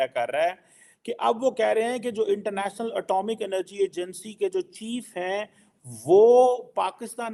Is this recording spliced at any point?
no; 0 cuts

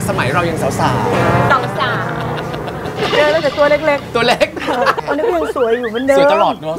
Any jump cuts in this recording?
yes; 1 cut; at 5.0 s

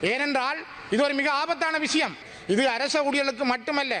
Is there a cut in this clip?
yes; 1 cut; at 2.3 s

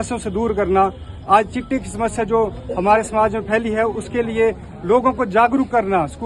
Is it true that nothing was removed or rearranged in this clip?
yes; 0 cuts

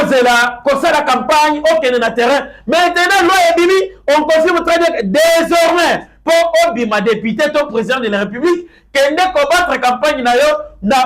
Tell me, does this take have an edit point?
no; 0 cuts

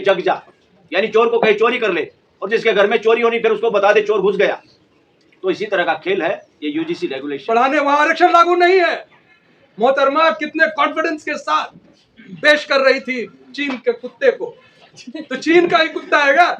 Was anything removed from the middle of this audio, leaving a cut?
yes; 1 cut; at 7.4 s

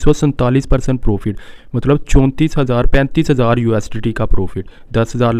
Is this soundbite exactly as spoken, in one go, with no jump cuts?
yes; 0 cuts

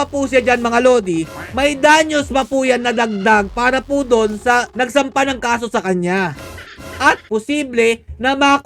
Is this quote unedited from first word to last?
no; 1 cut; at 7.2 s

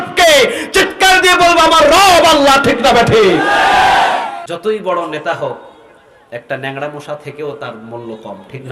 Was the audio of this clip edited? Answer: yes; 1 cut; at 4.4 s

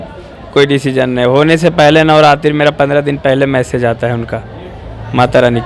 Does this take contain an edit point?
no; 0 cuts

